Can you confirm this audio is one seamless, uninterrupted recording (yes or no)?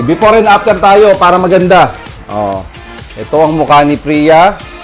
yes